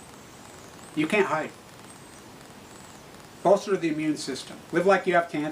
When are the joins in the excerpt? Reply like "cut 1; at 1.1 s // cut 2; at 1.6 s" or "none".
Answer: cut 1; at 2.5 s

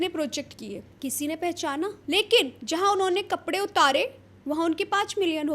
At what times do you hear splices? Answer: cut 1; at 0.9 s // cut 2; at 2.0 s

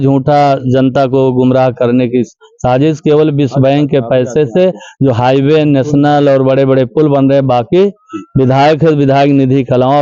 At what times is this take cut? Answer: none

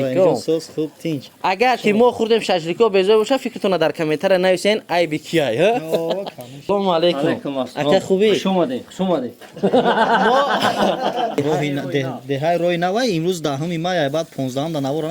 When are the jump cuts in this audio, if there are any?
cut 1; at 6.7 s // cut 2; at 11.4 s

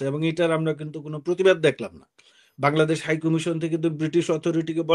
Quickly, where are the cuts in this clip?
none

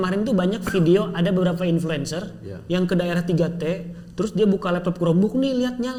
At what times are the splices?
none

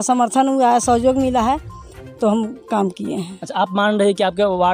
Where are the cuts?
none

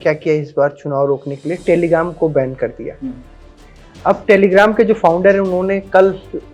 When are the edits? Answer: none

